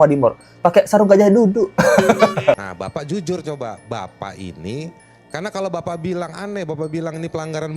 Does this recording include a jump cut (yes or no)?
yes